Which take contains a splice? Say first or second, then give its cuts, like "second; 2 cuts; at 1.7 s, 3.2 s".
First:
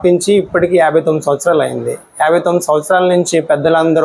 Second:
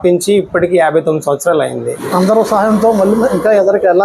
second; 1 cut; at 2.0 s